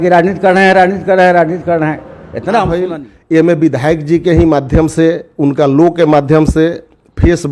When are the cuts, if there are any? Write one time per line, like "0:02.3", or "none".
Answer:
0:02.8